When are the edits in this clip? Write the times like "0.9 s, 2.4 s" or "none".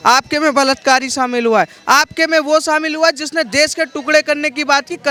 none